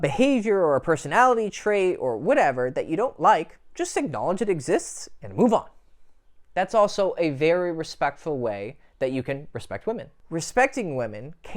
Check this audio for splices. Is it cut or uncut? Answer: cut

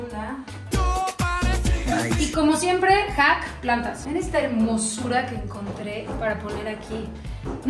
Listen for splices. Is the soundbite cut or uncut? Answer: uncut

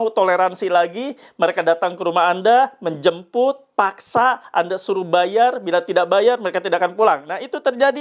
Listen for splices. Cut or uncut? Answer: uncut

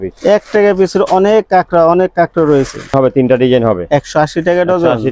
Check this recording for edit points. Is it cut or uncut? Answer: cut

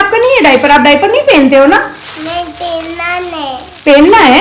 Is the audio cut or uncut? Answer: uncut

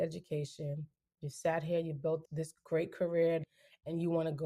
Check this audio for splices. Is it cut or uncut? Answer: cut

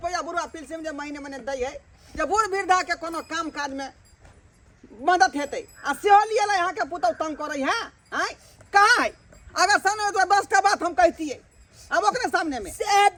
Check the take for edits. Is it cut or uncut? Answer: uncut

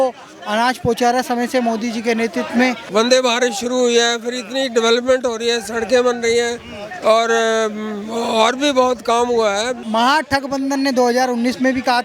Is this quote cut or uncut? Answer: cut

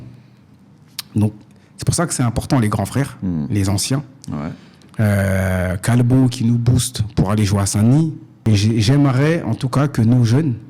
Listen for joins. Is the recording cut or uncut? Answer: cut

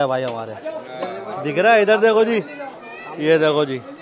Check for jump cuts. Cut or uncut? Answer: uncut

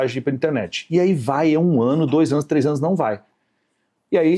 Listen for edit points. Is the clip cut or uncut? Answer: uncut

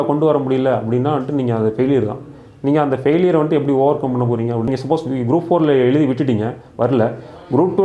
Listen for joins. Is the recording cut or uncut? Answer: cut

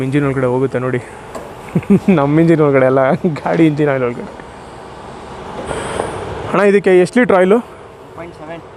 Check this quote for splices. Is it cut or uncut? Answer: uncut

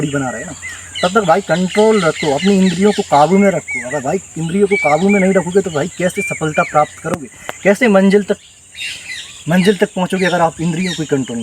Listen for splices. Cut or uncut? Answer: uncut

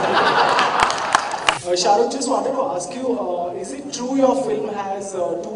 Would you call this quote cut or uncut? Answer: cut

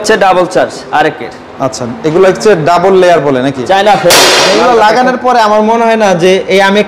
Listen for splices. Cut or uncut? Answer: cut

